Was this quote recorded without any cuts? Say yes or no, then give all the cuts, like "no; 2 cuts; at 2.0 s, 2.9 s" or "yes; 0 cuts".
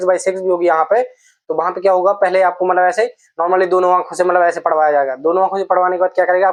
yes; 0 cuts